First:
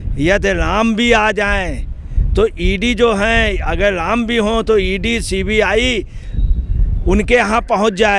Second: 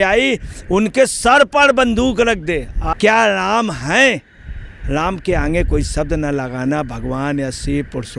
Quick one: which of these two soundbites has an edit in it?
second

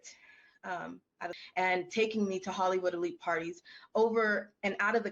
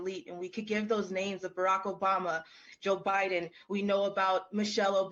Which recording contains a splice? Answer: first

